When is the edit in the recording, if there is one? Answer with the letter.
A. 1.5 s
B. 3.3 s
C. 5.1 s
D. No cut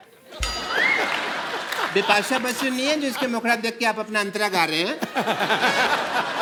D